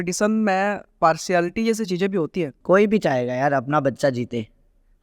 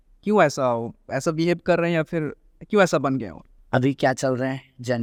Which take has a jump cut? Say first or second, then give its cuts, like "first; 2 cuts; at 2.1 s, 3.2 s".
first; 2 cuts; at 0.9 s, 2.6 s